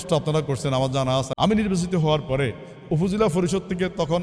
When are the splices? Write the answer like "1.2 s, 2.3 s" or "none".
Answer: 1.3 s